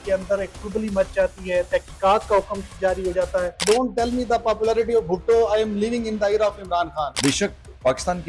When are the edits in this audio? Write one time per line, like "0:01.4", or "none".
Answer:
0:03.6
0:07.1